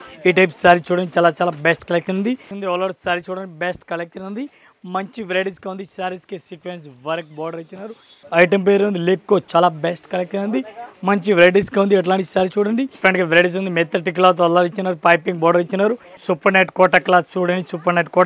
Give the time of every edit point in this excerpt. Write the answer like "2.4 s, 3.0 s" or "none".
2.5 s, 8.2 s, 12.9 s, 16.1 s